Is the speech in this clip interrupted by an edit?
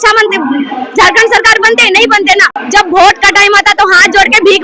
yes; 1 cut; at 2.6 s

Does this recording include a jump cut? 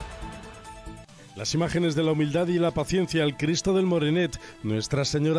yes; 1 cut; at 1.1 s

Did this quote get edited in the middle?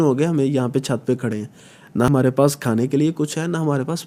no; 0 cuts

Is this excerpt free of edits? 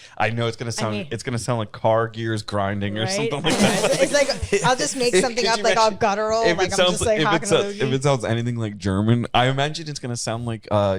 yes; 0 cuts

